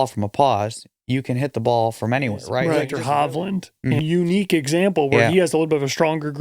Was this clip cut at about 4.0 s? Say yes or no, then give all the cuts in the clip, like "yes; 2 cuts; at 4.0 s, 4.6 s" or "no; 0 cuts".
yes; 2 cuts; at 2.9 s, 4.0 s